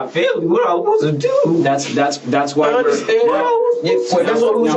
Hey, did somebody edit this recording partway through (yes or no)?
no